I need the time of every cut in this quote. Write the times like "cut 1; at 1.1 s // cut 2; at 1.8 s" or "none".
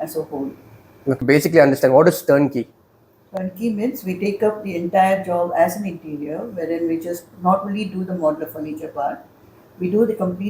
cut 1; at 1.2 s

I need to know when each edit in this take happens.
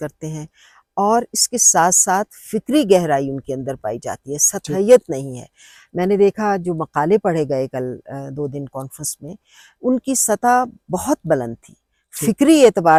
none

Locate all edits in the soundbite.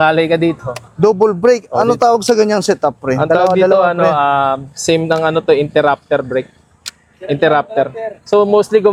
none

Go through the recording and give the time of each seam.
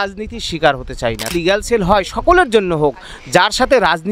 cut 1; at 1.3 s

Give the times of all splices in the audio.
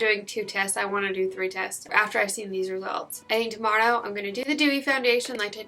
none

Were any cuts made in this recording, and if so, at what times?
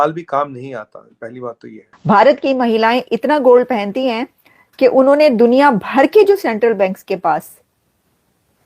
cut 1; at 1.9 s

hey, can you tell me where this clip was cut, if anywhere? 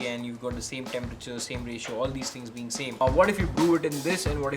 cut 1; at 3.0 s

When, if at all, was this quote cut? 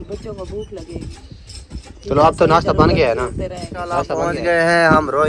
cut 1; at 4.1 s

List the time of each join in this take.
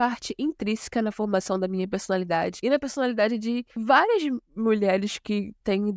cut 1; at 2.6 s // cut 2; at 3.7 s

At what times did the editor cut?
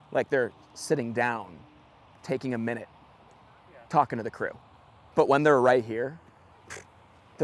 none

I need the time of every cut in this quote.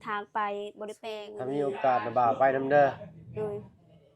cut 1; at 1.1 s

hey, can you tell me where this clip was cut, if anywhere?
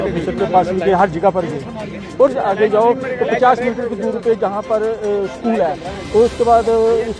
cut 1; at 2.3 s

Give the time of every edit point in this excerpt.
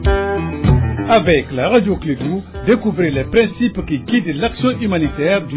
none

